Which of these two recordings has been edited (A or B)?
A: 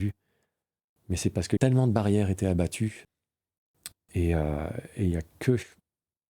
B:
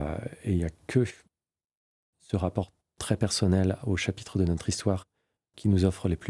A